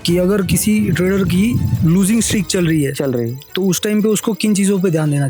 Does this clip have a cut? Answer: no; 0 cuts

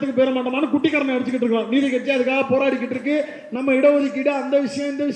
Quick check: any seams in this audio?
no; 0 cuts

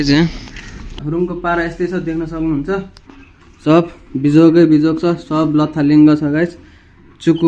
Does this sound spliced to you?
yes; 1 cut; at 1.0 s

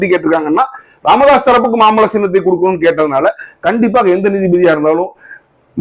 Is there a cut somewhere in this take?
no; 0 cuts

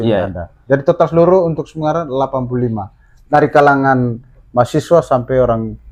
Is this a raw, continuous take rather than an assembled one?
yes; 0 cuts

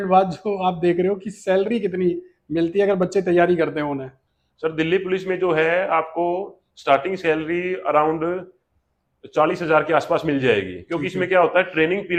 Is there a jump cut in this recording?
no; 0 cuts

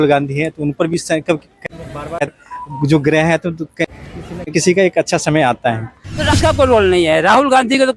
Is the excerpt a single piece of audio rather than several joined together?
no; 1 cut; at 6.3 s

